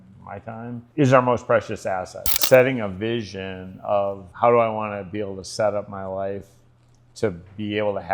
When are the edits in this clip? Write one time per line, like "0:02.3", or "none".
0:00.9
0:02.4
0:04.2